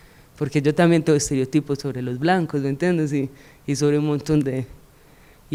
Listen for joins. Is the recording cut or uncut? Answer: uncut